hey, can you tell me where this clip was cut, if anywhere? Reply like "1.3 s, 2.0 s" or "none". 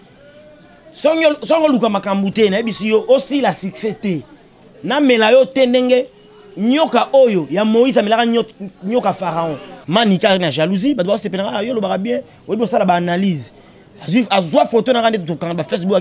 9.7 s